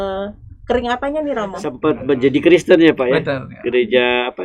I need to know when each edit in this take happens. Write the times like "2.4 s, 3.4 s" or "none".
1.7 s